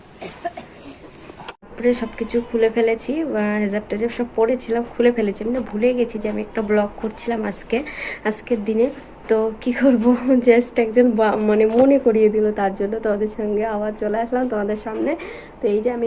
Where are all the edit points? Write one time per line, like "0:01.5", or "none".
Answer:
0:01.7